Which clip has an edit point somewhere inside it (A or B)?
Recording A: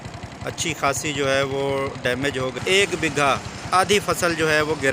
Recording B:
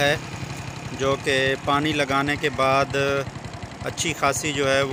A